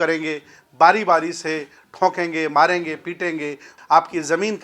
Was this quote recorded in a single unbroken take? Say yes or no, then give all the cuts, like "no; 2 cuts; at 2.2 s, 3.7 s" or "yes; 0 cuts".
no; 1 cut; at 3.7 s